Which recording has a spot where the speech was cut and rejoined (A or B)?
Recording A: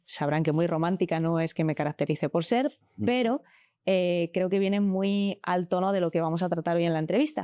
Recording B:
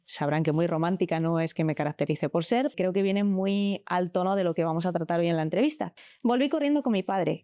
B